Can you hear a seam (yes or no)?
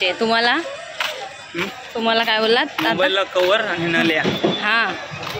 no